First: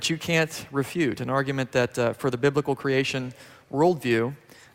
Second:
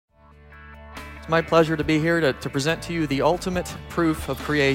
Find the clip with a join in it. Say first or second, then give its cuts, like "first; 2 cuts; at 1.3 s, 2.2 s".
second; 1 cut; at 3.2 s